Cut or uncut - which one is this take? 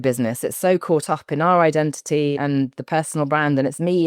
cut